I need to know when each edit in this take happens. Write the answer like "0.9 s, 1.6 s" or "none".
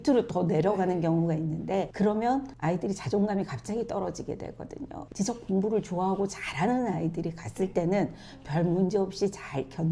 5.0 s